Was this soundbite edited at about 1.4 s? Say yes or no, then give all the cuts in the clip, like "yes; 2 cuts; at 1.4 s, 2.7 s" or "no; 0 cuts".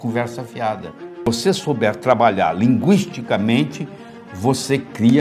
yes; 1 cut; at 1.4 s